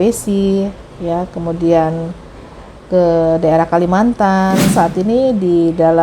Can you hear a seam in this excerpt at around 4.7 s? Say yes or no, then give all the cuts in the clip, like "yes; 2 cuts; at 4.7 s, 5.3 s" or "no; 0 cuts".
yes; 1 cut; at 4.7 s